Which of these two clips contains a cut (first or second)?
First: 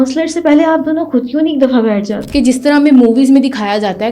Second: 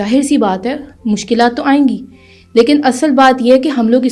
first